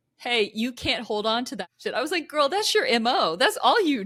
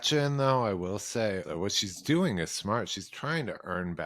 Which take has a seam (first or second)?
second